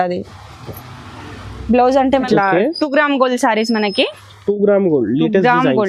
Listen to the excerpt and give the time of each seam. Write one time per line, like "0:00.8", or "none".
0:02.2